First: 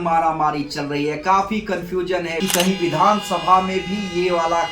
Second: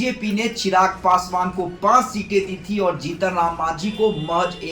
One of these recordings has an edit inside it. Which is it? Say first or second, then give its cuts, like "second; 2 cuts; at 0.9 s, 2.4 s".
first; 1 cut; at 2.3 s